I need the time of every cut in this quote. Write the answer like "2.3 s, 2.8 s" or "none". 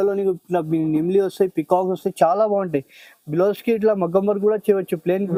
none